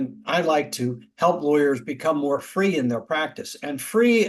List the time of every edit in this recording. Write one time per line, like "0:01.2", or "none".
none